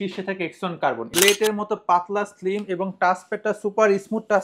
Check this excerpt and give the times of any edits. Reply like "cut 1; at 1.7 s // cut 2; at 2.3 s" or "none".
cut 1; at 1.1 s